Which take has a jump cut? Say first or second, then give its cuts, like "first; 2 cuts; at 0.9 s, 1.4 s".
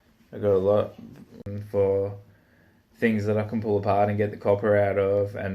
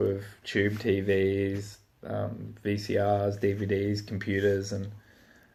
first; 1 cut; at 1.5 s